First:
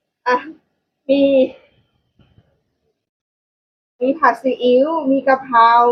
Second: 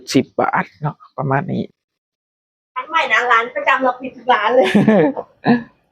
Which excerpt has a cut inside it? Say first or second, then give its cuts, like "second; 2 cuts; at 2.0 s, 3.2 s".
second; 1 cut; at 1.7 s